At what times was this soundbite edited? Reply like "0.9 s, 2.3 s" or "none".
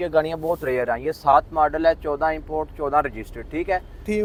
none